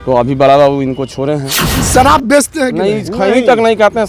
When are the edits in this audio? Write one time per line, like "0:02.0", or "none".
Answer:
0:01.9